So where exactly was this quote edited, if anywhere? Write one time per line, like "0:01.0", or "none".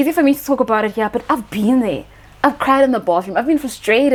none

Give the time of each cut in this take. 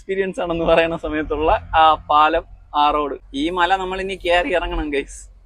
0:03.2

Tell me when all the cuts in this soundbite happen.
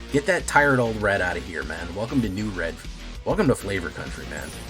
0:03.6

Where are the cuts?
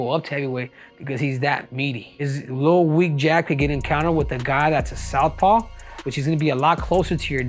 0:02.1

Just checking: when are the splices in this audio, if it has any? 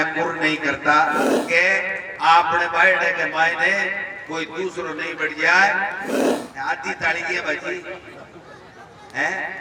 0:01.3
0:06.1

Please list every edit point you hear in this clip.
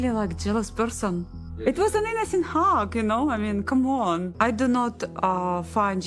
none

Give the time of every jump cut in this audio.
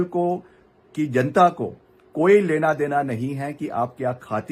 none

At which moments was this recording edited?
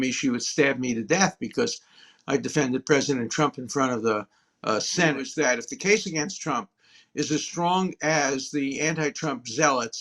0:05.2

